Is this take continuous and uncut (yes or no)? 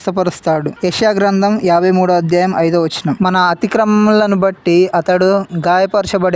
yes